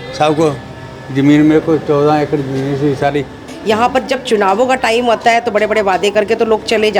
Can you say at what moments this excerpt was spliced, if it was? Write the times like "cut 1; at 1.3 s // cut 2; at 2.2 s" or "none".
cut 1; at 3.5 s